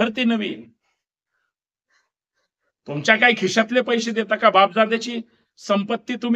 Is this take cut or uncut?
uncut